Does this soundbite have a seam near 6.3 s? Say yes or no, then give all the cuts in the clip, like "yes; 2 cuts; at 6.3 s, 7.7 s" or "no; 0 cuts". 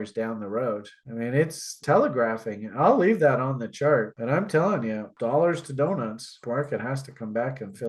no; 2 cuts; at 1.8 s, 5.1 s